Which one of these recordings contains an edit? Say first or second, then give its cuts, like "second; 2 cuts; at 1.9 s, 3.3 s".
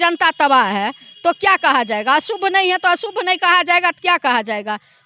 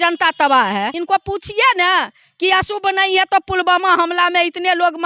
second; 1 cut; at 1.0 s